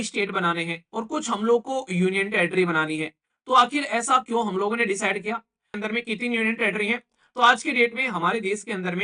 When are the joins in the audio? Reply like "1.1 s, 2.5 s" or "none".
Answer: 5.7 s